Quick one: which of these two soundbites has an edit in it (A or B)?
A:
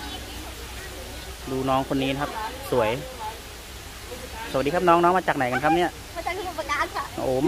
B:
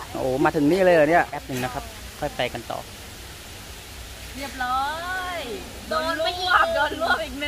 B